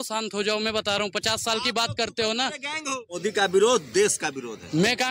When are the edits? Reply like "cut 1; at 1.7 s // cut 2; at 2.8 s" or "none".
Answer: cut 1; at 3.2 s